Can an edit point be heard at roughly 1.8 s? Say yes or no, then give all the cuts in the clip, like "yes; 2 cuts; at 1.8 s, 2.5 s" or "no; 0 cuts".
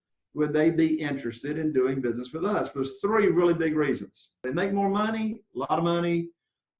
no; 1 cut; at 4.4 s